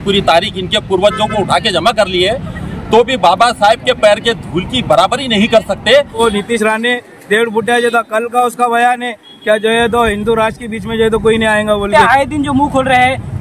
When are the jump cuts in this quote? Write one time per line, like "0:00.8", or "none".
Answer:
0:06.2
0:11.9